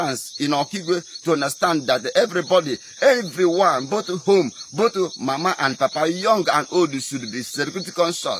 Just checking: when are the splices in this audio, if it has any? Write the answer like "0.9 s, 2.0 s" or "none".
none